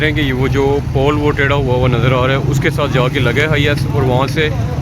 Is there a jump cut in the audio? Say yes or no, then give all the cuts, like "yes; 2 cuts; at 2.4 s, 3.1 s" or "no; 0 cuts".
no; 0 cuts